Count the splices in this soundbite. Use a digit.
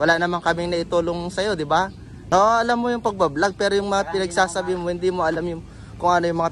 1